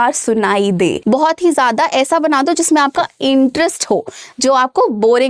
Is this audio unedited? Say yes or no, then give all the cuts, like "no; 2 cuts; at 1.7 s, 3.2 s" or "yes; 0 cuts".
no; 1 cut; at 1.0 s